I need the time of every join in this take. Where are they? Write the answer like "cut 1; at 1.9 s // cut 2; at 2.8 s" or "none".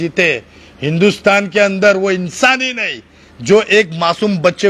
none